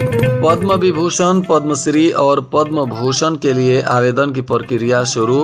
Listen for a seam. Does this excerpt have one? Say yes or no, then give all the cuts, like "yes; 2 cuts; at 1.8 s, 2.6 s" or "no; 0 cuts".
no; 0 cuts